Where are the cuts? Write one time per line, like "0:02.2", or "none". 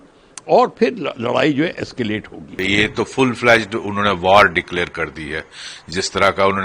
0:02.6